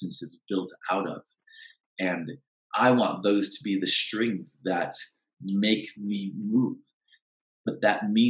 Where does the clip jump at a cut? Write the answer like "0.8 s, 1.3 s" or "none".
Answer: 2.5 s